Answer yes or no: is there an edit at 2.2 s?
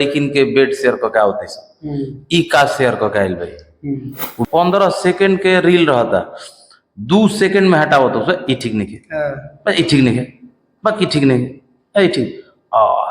no